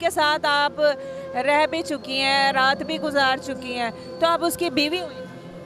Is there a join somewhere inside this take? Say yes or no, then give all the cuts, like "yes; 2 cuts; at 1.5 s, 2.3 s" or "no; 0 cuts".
no; 0 cuts